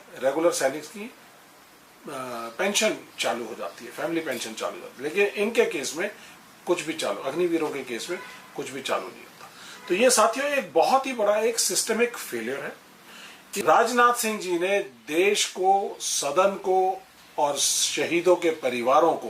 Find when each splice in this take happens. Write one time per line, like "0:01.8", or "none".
0:13.6